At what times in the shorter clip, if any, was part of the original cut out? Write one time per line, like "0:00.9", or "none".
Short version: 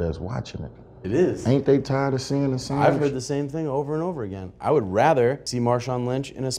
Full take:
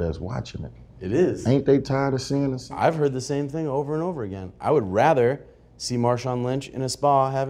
0:05.5